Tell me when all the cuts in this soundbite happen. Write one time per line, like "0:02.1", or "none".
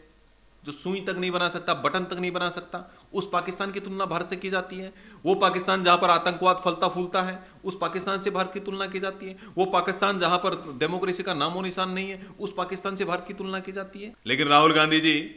0:14.1

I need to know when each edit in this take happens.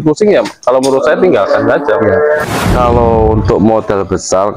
0:02.4

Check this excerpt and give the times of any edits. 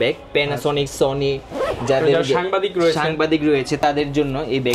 none

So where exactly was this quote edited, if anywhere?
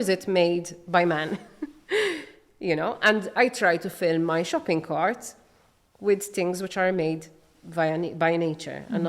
none

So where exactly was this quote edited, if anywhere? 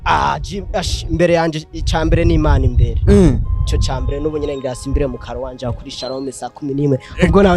none

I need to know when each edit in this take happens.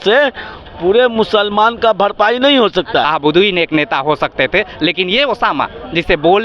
0:03.1

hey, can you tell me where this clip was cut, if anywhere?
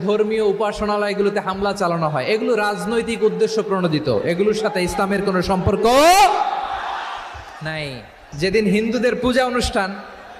0:08.4

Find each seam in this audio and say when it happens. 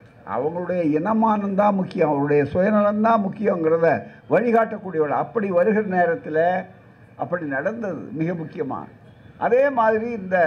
none

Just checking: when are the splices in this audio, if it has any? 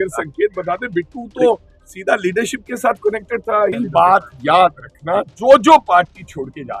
0:03.8

